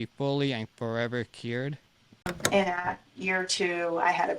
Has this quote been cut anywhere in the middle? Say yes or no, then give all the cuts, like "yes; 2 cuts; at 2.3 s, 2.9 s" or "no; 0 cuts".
yes; 1 cut; at 2.4 s